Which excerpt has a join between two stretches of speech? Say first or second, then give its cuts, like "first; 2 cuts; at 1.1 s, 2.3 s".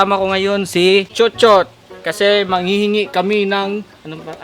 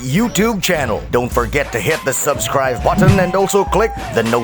first; 1 cut; at 1.1 s